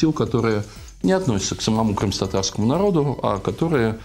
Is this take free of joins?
yes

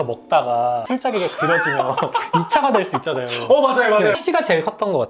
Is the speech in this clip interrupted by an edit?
yes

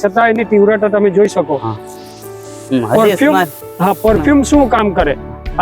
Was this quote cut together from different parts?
no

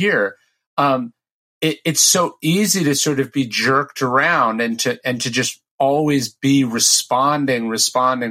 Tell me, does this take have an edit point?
no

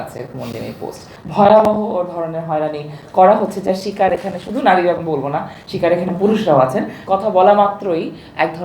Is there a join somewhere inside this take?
yes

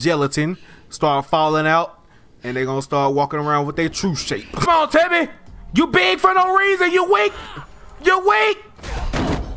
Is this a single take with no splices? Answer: no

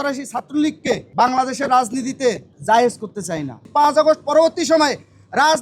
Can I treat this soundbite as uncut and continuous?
no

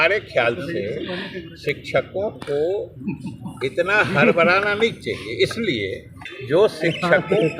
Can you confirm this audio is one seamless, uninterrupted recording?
no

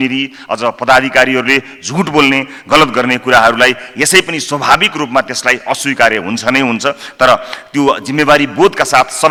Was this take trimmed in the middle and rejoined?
no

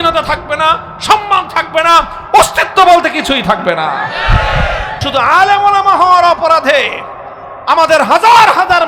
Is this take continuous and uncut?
no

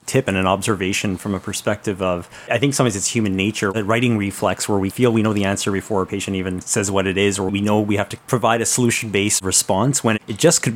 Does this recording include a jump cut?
yes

